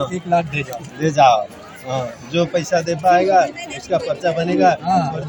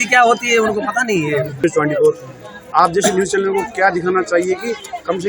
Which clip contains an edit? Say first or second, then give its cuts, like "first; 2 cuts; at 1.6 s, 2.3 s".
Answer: second; 1 cut; at 1.6 s